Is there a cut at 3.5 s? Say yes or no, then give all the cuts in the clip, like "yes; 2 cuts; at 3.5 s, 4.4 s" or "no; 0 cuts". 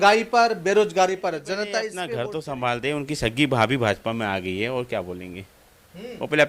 no; 1 cut; at 2.1 s